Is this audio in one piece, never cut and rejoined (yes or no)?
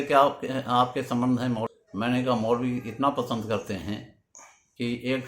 no